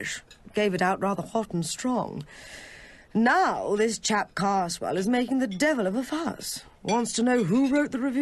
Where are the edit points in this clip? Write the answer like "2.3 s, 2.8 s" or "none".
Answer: 2.1 s

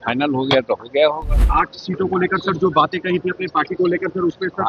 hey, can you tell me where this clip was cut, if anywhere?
1.3 s

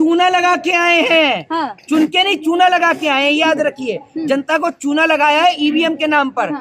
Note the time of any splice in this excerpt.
none

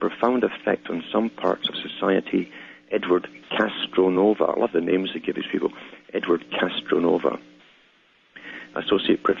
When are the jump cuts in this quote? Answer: 1.3 s

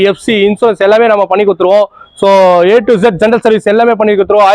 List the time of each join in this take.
none

